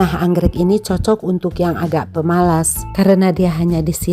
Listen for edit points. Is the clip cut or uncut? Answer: cut